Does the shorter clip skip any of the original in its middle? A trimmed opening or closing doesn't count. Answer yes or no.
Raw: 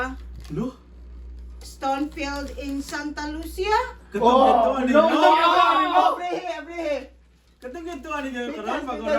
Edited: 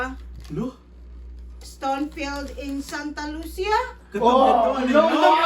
no